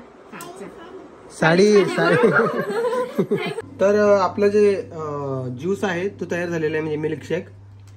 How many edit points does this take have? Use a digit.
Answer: 1